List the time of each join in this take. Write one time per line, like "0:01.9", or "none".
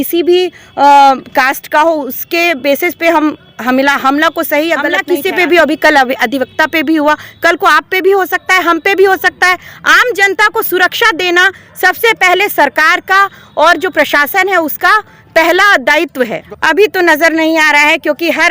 0:05.0
0:16.4